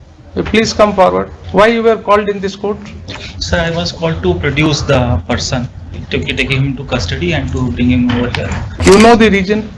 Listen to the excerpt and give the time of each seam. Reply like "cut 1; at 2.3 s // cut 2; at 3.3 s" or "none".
cut 1; at 1.4 s // cut 2; at 8.7 s